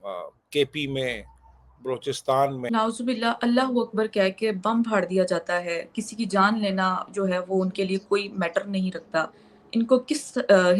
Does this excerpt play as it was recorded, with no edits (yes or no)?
no